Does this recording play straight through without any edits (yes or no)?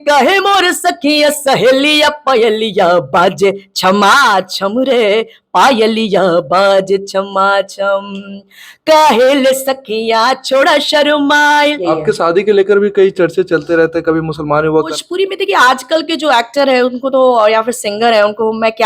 no